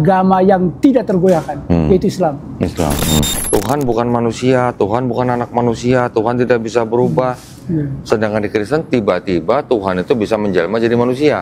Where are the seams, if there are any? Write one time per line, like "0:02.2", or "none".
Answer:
0:03.4